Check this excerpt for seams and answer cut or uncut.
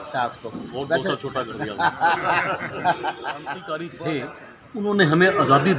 cut